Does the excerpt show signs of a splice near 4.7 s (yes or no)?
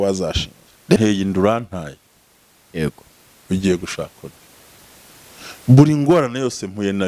no